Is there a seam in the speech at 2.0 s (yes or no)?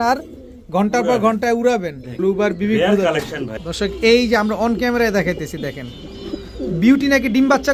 yes